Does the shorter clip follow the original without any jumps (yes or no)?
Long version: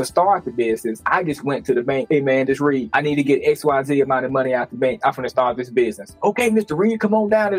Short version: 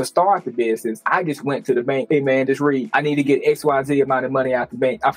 yes